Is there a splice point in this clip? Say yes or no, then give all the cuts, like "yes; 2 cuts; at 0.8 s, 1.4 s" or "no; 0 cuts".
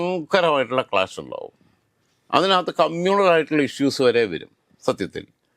no; 0 cuts